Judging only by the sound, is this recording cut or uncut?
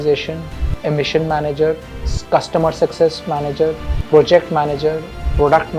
cut